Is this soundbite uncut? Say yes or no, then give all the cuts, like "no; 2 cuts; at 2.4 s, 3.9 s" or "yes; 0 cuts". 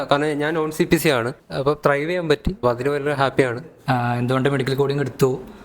no; 3 cuts; at 1.5 s, 2.6 s, 3.7 s